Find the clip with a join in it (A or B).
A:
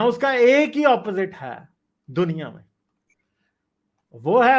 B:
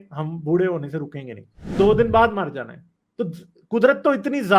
B